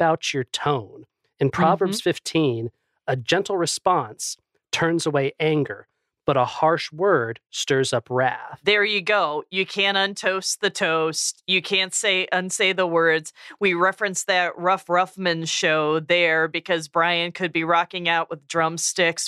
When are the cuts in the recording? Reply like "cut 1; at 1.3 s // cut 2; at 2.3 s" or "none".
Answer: cut 1; at 3.3 s // cut 2; at 8.5 s